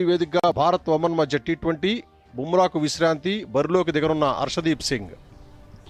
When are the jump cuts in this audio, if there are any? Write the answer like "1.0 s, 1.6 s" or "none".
none